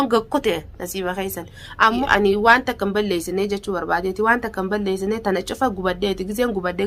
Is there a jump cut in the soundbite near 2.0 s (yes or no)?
yes